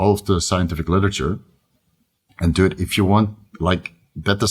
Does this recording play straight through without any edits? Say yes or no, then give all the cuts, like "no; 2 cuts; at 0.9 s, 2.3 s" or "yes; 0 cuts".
yes; 0 cuts